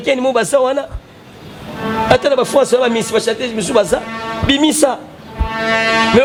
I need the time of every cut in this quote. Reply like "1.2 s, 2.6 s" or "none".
none

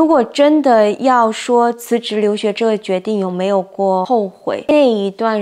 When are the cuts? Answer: 1.0 s, 4.1 s

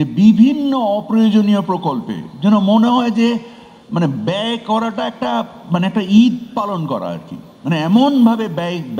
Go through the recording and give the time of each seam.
none

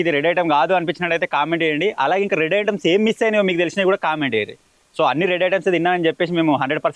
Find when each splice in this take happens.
none

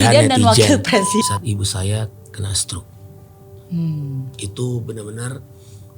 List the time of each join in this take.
1.2 s

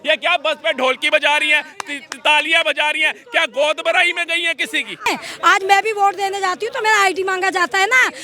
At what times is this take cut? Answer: 5.1 s

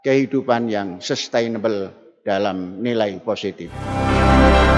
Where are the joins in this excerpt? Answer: 3.9 s

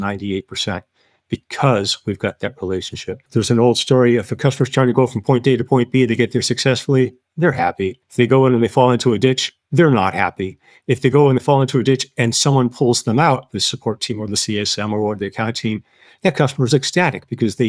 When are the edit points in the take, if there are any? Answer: 3.2 s, 8.0 s

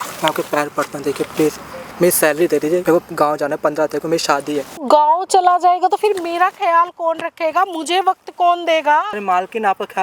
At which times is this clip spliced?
2.8 s, 4.8 s, 9.1 s

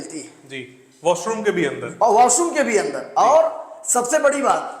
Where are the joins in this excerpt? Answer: none

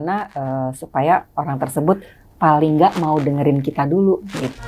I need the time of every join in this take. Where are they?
none

